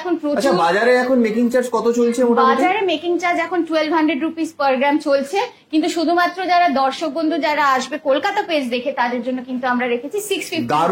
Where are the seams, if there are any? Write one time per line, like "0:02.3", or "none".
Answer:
none